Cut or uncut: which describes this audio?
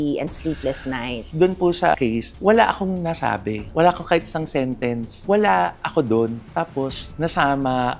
cut